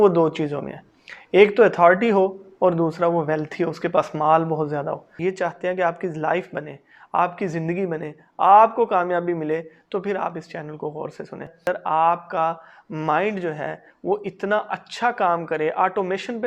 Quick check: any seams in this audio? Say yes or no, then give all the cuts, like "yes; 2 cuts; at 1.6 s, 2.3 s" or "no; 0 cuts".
yes; 2 cuts; at 5.1 s, 11.7 s